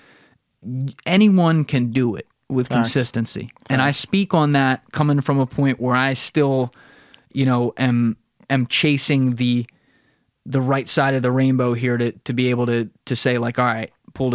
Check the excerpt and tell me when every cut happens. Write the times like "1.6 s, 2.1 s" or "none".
none